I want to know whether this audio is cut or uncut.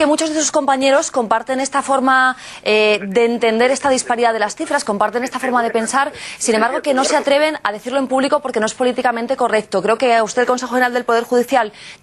cut